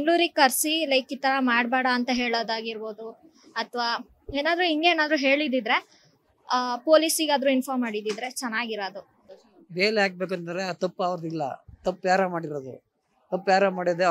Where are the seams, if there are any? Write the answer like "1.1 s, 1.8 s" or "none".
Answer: 9.2 s